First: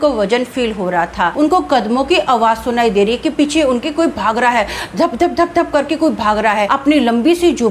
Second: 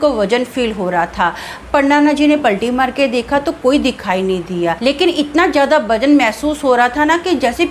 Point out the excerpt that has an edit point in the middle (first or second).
first